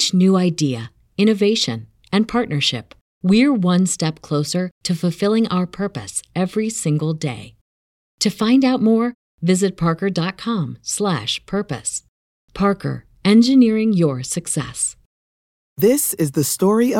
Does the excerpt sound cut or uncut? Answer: cut